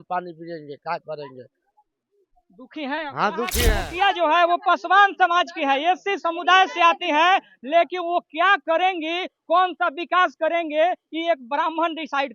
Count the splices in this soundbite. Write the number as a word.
one